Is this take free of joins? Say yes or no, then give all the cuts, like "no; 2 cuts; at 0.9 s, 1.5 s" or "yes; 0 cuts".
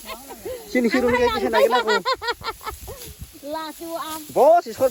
yes; 0 cuts